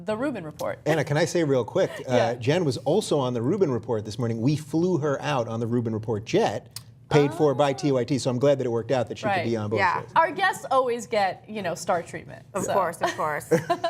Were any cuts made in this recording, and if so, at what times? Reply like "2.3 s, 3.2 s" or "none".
none

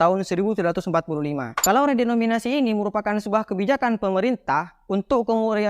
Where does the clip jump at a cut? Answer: 1.5 s

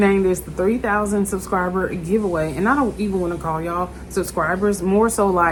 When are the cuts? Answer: none

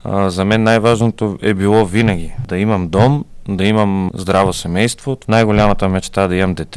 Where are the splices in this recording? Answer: 2.4 s, 4.1 s, 5.1 s

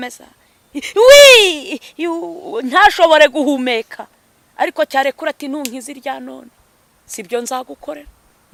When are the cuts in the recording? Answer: none

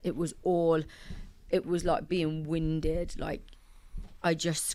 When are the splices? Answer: none

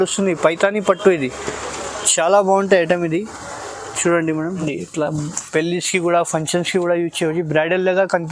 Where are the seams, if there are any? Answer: 4.6 s

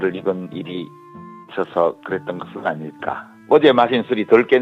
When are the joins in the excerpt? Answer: 3.3 s

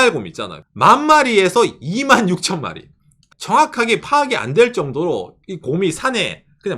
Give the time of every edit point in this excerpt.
3.3 s

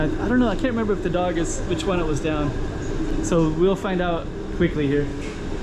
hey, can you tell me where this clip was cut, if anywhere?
none

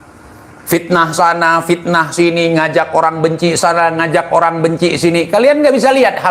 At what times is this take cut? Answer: none

